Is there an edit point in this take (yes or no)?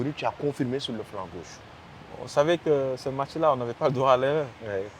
yes